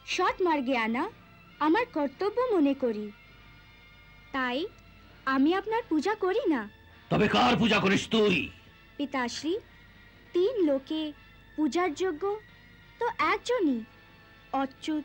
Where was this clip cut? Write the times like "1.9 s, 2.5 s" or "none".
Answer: none